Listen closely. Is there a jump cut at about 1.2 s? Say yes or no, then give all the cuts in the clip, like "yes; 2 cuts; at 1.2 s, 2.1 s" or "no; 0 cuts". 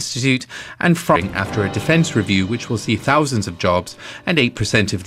no; 0 cuts